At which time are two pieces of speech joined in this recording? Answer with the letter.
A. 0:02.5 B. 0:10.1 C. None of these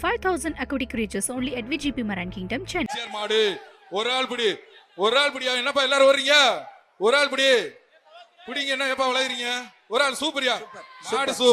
A